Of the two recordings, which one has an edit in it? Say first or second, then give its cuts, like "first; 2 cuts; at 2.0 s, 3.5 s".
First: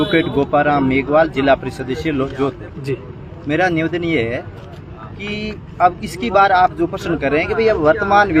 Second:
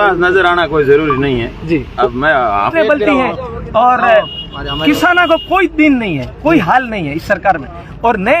second; 1 cut; at 2.7 s